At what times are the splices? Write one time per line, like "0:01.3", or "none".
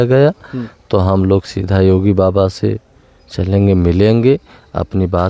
none